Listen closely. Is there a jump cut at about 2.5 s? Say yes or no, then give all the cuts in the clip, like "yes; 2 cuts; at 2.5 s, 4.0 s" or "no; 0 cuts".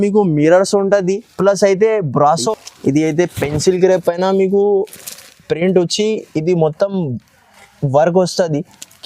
yes; 1 cut; at 2.5 s